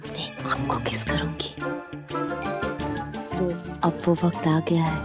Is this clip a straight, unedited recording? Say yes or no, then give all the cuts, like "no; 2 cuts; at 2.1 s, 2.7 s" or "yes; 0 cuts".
no; 1 cut; at 2.7 s